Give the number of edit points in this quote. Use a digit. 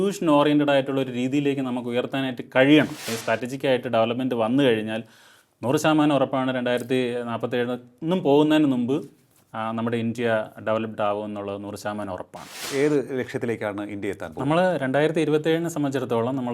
2